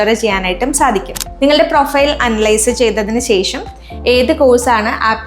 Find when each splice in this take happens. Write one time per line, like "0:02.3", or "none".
0:01.2